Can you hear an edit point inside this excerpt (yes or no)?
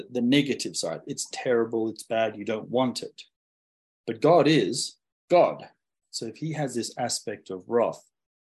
no